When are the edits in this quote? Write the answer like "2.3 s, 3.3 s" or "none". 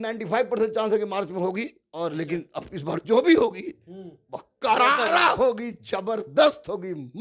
none